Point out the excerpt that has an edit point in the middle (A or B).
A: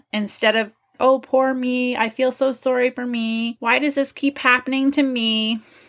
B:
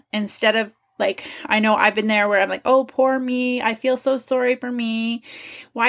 A